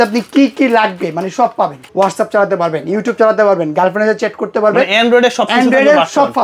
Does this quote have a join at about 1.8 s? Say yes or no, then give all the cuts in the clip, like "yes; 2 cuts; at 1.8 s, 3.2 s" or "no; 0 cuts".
yes; 1 cut; at 1.8 s